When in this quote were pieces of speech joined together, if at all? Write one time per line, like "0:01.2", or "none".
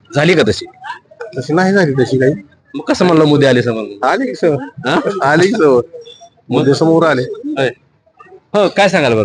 none